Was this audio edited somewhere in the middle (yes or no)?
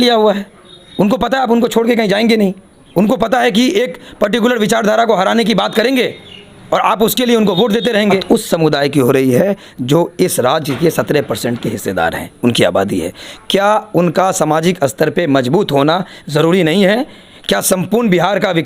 yes